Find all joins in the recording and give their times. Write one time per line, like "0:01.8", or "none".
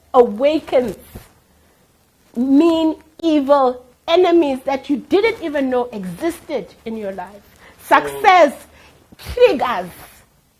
none

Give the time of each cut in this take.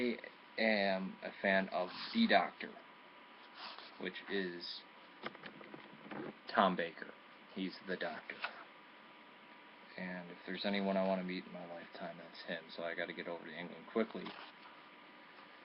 0:08.2

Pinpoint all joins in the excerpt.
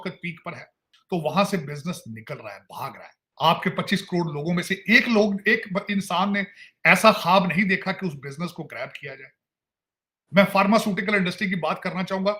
none

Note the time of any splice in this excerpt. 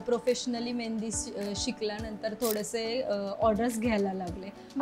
none

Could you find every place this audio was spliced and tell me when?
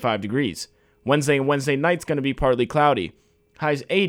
none

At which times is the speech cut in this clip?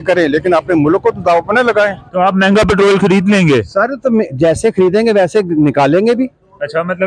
0:02.0

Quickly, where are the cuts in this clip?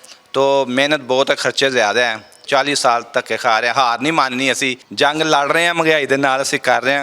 0:02.4
0:04.8

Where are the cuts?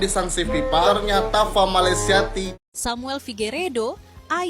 0:02.4

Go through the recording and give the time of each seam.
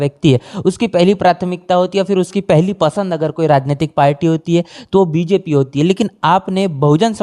none

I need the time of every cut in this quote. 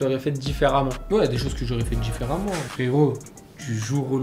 0:02.7

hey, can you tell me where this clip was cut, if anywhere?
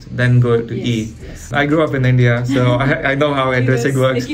0:01.5

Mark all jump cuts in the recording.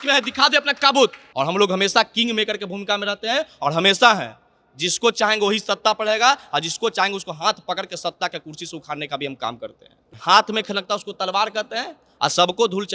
0:01.2
0:10.1

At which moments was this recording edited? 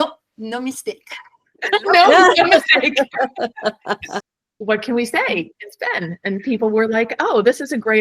0:04.1

